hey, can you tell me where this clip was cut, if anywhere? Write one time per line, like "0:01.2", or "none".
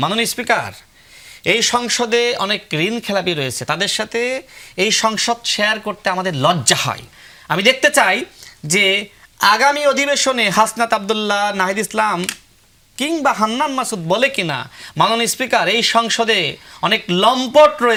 none

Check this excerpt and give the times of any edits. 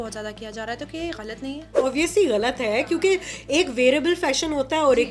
0:01.8

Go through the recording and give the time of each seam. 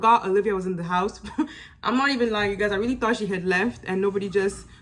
none

